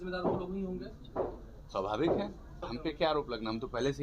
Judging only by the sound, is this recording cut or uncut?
cut